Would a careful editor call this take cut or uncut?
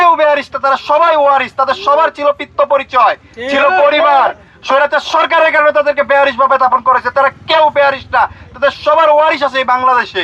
uncut